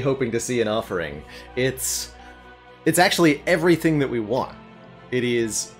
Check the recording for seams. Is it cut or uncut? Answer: uncut